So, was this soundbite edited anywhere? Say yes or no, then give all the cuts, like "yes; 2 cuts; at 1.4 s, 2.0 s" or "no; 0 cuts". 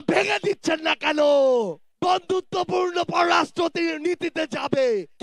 yes; 1 cut; at 1.8 s